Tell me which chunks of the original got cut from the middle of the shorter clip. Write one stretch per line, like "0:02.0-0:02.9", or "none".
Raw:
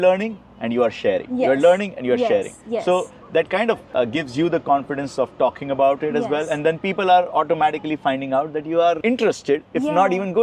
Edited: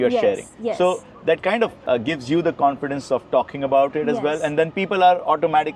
none